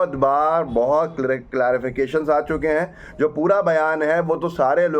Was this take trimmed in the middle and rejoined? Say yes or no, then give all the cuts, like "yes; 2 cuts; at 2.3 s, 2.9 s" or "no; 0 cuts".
no; 0 cuts